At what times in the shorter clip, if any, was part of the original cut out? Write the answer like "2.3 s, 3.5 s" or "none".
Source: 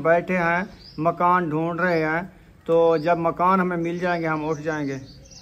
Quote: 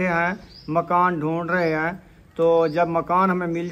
none